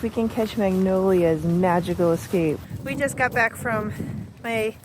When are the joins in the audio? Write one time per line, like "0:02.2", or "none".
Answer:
0:02.6